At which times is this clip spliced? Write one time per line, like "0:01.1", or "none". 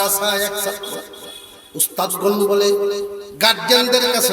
0:03.2

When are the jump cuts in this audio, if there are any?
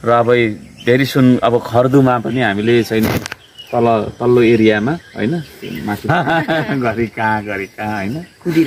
0:06.1

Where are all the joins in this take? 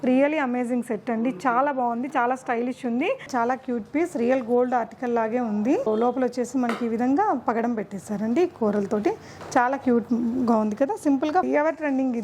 0:03.3
0:05.9
0:11.5

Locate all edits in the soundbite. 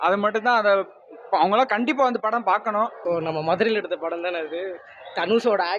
0:03.0

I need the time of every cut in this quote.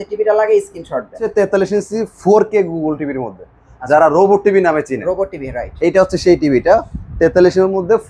0:01.2

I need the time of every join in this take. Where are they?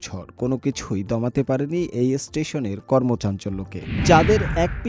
0:03.9

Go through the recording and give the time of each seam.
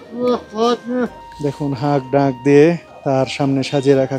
0:01.2
0:02.9

